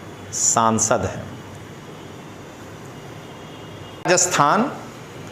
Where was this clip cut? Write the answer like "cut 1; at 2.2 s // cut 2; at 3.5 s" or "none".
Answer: cut 1; at 4.1 s